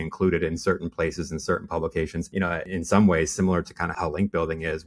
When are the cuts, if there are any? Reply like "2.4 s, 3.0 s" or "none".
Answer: 2.4 s, 3.9 s